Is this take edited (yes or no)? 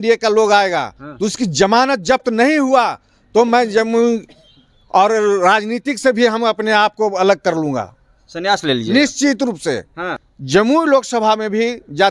yes